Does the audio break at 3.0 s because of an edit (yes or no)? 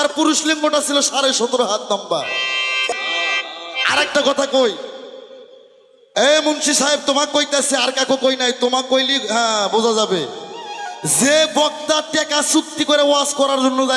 yes